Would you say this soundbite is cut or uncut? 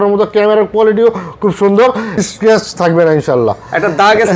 cut